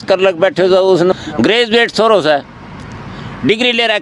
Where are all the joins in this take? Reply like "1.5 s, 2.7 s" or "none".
1.1 s